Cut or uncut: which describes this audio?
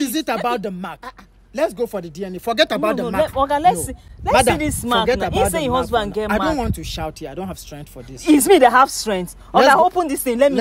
uncut